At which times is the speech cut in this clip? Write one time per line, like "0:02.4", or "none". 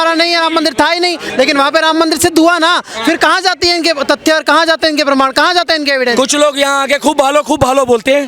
0:06.1

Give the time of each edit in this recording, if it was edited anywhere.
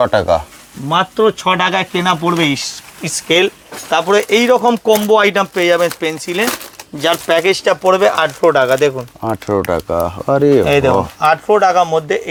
none

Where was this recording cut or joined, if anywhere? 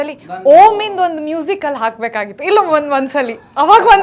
none

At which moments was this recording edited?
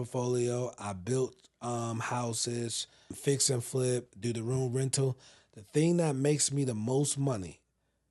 0:03.2
0:04.1

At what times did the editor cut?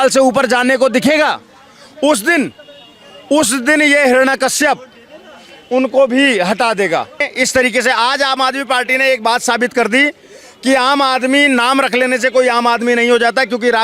0:07.3

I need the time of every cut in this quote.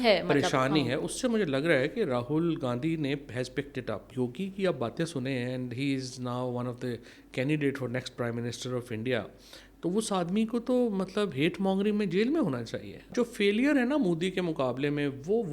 0:04.0
0:13.1

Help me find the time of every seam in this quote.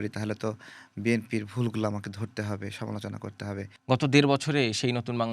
0:03.7

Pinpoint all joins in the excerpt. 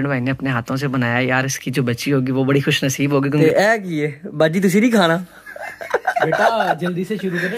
0:03.4

